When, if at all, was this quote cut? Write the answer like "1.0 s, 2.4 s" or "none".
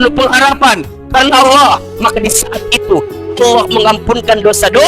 none

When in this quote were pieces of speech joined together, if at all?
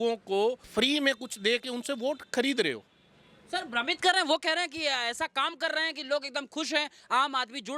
none

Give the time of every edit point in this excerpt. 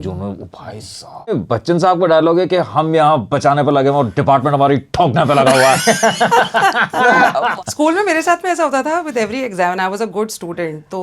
1.3 s, 7.5 s

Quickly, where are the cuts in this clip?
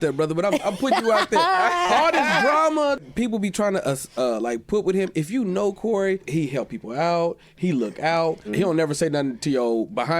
3.0 s, 6.3 s, 8.5 s

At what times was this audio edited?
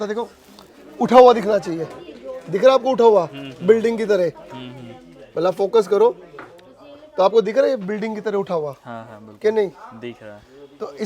none

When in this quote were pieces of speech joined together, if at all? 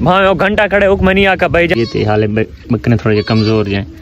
1.8 s

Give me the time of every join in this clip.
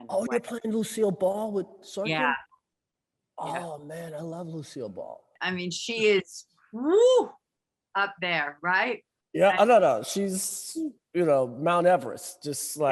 5.3 s

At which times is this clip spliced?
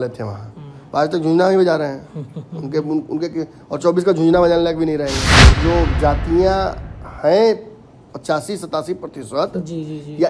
5.5 s

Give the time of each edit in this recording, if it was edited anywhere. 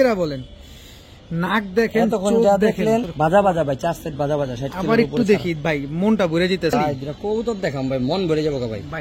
3.1 s, 6.7 s

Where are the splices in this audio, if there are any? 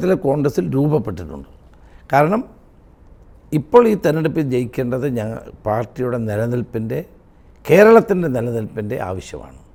none

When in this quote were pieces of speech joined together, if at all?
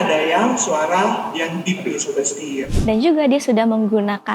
2.7 s

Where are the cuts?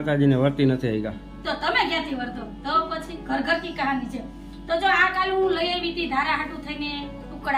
none

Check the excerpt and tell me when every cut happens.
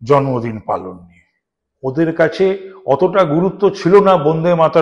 none

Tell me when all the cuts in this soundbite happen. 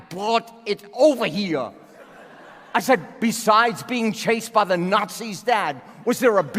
none

